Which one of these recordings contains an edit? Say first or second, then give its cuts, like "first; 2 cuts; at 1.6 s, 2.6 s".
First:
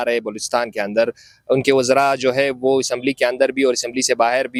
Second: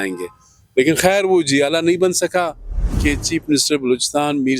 second; 1 cut; at 2.9 s